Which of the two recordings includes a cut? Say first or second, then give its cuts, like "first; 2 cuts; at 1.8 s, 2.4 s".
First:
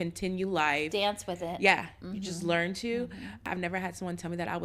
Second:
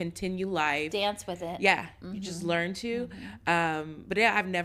first; 1 cut; at 3.4 s